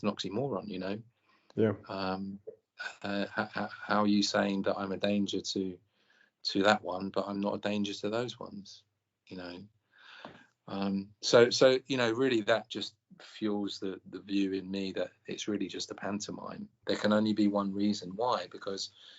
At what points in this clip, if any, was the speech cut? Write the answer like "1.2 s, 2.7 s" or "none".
16.8 s